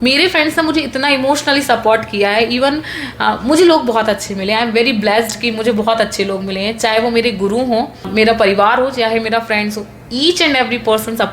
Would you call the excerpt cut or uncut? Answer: cut